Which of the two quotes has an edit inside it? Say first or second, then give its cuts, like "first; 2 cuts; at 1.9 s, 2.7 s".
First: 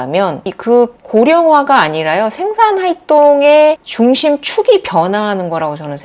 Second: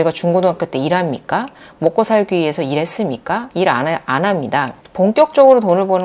second; 1 cut; at 4.8 s